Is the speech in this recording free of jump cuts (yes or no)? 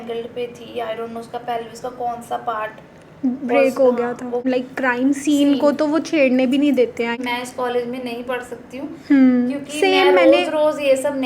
no